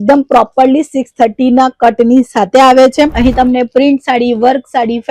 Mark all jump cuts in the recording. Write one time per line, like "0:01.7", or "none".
0:03.1